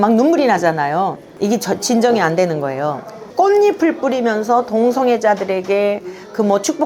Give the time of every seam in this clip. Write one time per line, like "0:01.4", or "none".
0:03.2